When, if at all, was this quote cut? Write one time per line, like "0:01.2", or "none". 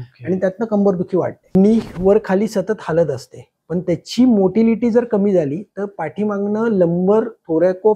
0:01.5